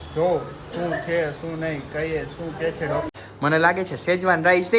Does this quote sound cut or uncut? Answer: cut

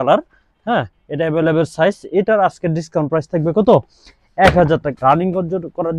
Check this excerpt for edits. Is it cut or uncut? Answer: cut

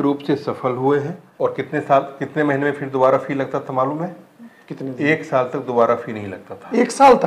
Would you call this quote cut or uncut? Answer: cut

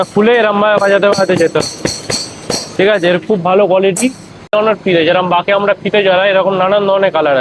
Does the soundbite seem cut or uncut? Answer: cut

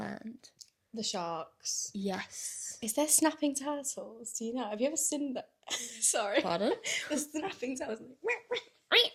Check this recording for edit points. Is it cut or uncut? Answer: uncut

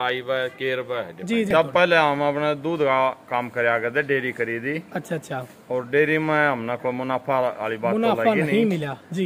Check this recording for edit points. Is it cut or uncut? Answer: cut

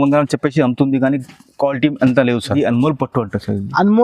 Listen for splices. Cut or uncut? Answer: cut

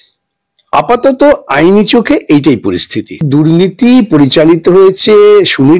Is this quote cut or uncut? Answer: cut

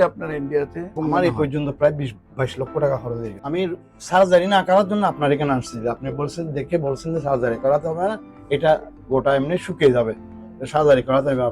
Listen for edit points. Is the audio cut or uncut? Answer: cut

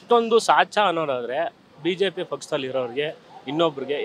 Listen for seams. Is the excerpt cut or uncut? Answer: uncut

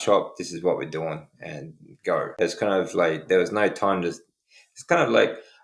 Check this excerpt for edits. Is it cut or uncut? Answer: cut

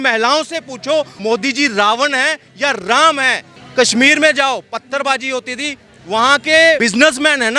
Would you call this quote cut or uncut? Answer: cut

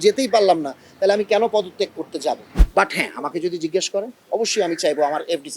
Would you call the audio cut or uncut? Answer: cut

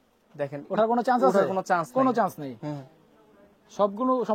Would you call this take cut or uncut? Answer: uncut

